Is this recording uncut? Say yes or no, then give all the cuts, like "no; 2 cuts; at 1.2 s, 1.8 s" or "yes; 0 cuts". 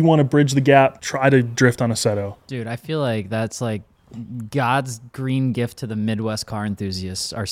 no; 1 cut; at 1.1 s